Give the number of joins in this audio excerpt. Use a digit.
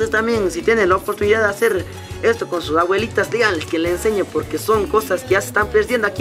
0